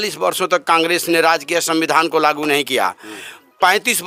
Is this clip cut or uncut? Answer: uncut